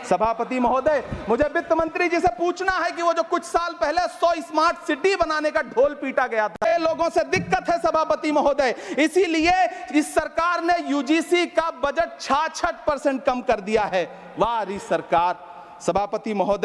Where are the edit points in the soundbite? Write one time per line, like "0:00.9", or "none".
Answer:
0:06.6